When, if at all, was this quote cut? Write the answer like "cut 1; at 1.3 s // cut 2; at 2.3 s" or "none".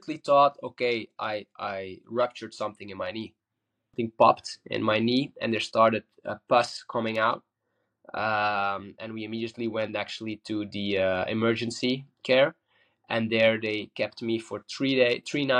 cut 1; at 3.9 s